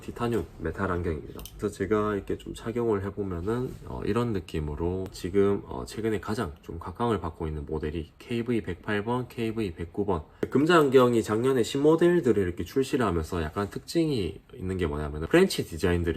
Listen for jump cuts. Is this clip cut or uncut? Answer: cut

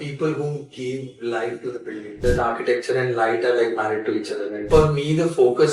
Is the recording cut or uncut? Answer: cut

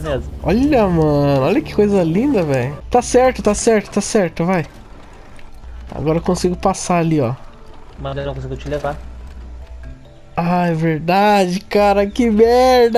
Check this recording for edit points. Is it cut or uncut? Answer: cut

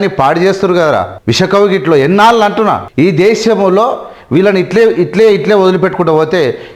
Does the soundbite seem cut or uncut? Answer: cut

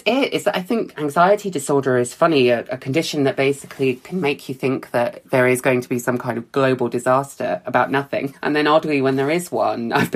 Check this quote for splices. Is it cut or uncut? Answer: cut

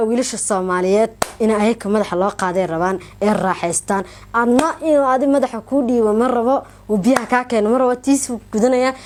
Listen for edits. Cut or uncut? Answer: uncut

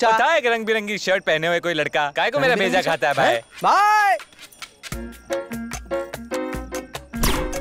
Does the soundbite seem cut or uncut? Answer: uncut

